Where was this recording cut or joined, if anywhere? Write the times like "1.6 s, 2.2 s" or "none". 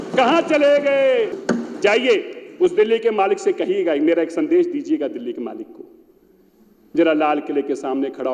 1.4 s